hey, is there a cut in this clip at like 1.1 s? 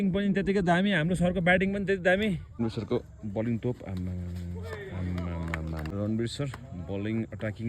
no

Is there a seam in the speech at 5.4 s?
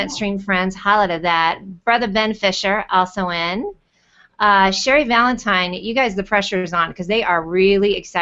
no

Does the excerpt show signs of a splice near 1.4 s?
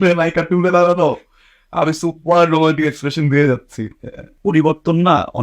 no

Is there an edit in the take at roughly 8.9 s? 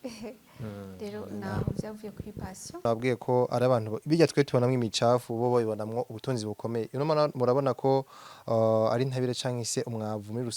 no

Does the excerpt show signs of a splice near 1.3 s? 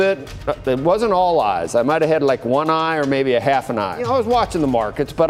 no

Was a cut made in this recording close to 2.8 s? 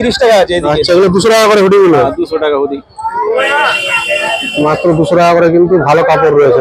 no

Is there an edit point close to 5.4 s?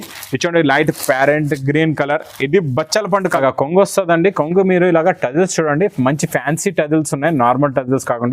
no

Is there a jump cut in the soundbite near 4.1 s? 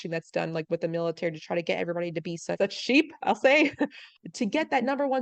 yes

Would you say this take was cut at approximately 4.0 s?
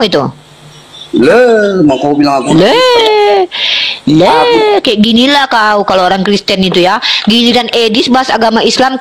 no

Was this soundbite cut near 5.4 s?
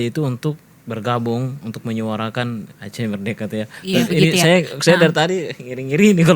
no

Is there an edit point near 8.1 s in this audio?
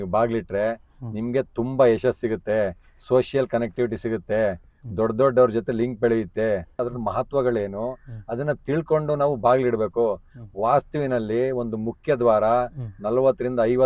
no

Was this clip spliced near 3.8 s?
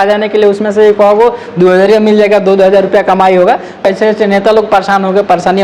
yes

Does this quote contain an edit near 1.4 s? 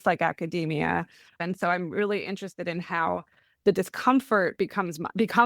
yes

